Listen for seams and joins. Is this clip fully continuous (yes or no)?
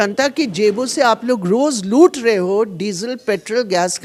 yes